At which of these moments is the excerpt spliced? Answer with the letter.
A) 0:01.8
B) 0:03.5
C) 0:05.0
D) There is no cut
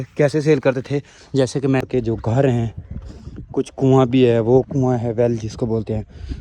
A